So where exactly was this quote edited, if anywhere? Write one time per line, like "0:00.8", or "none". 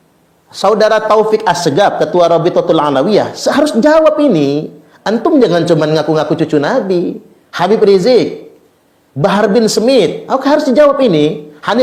none